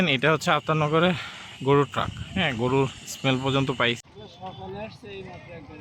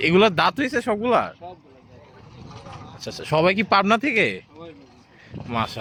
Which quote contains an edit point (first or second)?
first